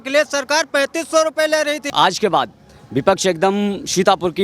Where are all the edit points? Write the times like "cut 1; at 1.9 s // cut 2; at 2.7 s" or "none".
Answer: cut 1; at 1.9 s